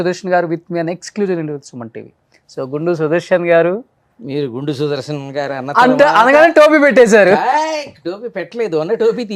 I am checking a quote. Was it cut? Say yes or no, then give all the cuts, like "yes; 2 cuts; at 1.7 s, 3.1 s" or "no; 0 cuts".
no; 0 cuts